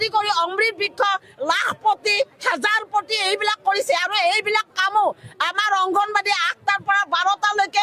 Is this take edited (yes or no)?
no